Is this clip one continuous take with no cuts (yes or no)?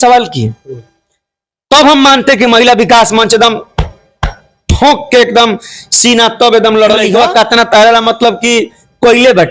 no